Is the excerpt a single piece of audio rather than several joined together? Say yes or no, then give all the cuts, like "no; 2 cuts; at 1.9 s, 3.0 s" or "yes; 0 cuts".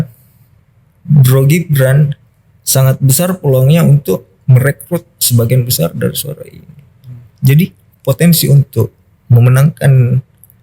no; 1 cut; at 7.9 s